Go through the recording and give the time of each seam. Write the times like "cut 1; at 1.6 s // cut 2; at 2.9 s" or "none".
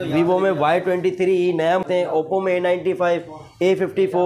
cut 1; at 1.8 s